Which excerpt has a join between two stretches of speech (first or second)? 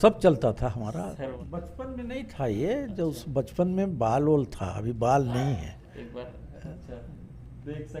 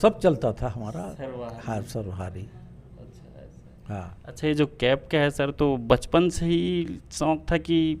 first